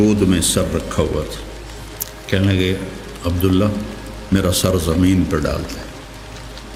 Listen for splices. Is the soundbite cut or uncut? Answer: uncut